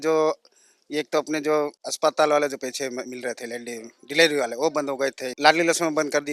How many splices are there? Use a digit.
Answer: 2